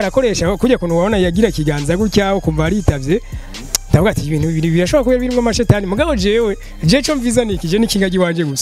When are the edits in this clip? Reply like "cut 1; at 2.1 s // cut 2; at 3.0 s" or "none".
none